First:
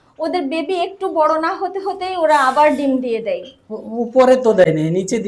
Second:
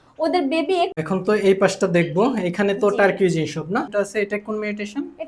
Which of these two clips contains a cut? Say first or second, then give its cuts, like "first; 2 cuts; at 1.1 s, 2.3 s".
second; 2 cuts; at 1.0 s, 3.9 s